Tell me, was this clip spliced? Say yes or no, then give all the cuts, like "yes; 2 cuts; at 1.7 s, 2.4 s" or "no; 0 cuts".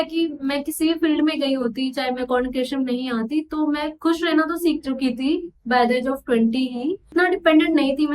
yes; 2 cuts; at 2.2 s, 7.0 s